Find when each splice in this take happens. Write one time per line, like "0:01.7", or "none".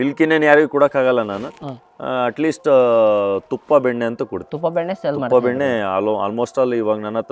none